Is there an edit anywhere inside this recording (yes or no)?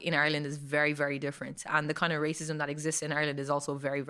no